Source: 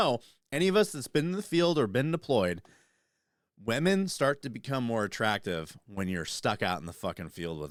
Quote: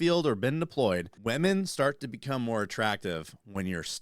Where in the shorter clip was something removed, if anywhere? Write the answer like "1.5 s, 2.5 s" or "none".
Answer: 1.1 s